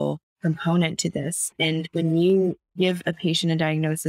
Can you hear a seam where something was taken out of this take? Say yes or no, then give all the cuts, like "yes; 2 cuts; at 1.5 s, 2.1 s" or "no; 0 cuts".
yes; 1 cut; at 2.6 s